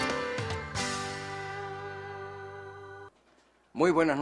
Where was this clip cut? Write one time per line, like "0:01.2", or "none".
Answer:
0:02.6